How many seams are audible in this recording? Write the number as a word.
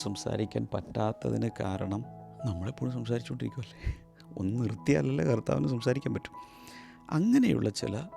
zero